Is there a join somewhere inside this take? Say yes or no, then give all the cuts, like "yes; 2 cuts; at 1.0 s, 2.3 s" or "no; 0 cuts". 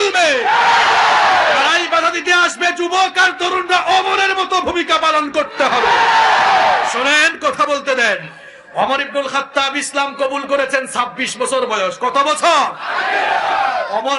no; 0 cuts